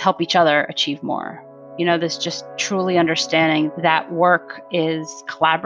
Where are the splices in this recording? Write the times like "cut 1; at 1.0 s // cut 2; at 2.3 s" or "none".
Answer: none